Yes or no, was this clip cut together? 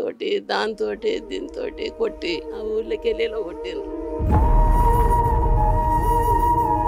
yes